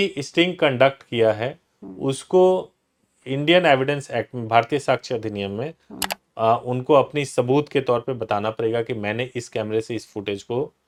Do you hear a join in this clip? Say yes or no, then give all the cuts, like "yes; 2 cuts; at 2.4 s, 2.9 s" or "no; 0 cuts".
no; 0 cuts